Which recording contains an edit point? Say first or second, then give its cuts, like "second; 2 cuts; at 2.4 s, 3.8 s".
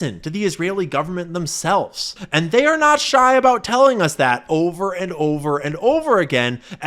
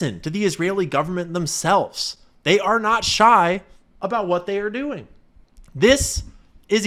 first; 1 cut; at 2.2 s